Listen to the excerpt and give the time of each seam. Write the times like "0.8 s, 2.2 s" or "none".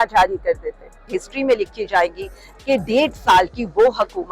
1.1 s